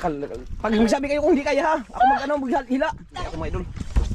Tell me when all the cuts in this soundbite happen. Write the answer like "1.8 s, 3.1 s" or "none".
3.2 s